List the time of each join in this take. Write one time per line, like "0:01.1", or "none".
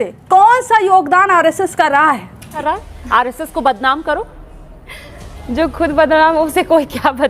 0:02.5